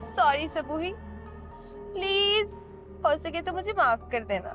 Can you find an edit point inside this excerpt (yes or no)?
no